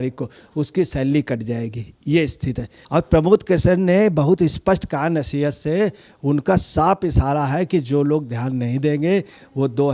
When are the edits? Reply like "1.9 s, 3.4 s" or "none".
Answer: 2.7 s